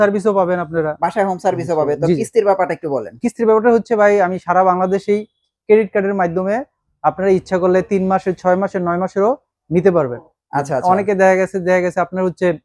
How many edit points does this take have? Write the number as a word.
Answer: zero